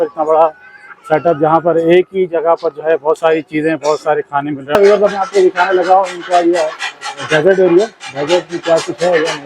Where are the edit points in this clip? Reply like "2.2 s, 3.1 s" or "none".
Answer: 4.6 s